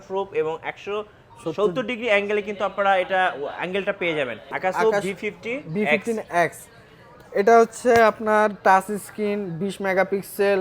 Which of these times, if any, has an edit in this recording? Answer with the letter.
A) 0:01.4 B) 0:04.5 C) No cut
B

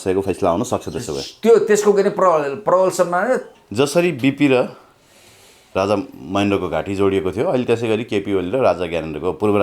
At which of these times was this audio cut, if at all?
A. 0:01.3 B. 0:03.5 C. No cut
B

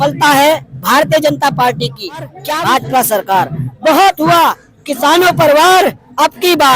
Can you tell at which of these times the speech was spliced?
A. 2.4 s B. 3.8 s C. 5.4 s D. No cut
A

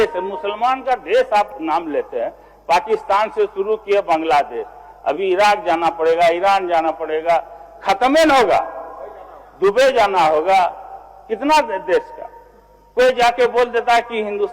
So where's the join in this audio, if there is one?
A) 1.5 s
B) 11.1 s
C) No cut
A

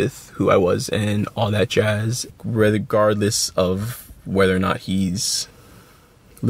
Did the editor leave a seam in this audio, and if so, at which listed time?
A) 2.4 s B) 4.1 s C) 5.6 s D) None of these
A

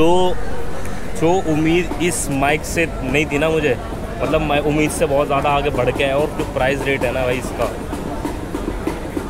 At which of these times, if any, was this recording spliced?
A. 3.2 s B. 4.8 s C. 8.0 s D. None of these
D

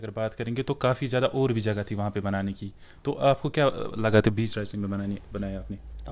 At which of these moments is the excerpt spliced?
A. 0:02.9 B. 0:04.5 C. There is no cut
C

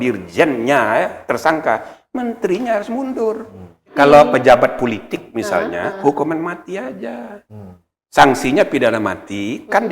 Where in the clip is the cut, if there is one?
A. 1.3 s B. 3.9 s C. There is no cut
B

